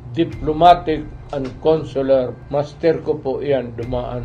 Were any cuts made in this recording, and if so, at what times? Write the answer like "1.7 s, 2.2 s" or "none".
1.2 s, 2.4 s